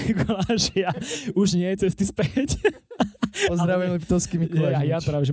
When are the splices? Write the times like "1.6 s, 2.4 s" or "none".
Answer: none